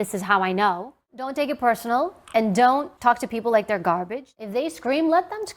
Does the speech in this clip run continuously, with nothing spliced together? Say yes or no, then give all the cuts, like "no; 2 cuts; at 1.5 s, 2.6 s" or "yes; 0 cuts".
no; 3 cuts; at 1.1 s, 2.9 s, 4.2 s